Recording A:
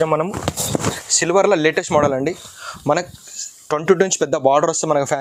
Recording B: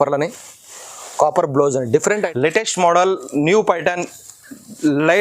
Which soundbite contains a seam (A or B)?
B